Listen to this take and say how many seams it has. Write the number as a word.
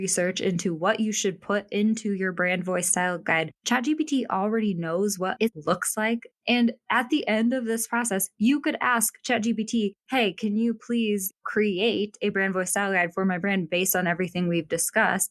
one